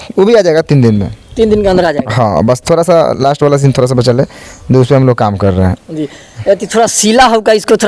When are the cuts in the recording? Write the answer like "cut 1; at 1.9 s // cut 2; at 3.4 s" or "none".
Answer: none